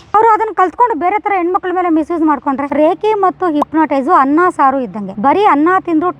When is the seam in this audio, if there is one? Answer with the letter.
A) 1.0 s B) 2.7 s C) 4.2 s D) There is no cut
B